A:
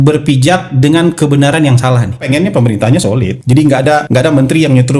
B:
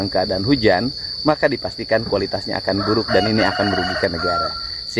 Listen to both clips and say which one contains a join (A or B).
A